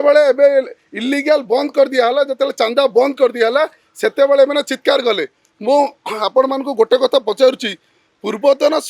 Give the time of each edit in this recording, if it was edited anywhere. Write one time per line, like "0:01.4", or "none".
none